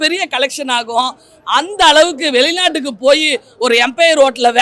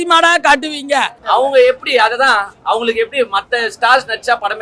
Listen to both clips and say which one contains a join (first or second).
second